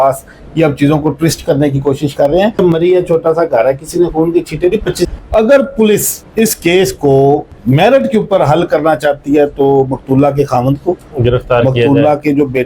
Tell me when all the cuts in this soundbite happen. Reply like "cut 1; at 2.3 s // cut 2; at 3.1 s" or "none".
cut 1; at 2.6 s // cut 2; at 5.1 s